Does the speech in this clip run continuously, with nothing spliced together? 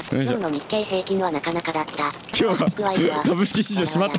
no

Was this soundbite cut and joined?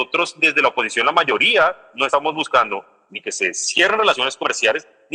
no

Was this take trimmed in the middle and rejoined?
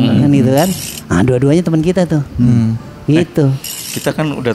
no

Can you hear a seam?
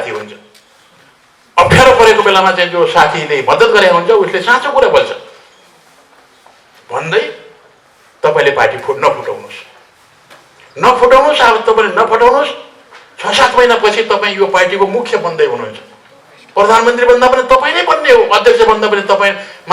no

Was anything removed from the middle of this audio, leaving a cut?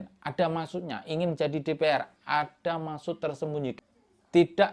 yes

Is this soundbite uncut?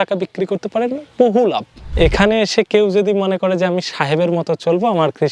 no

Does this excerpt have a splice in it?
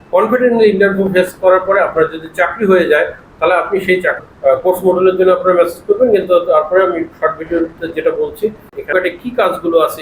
yes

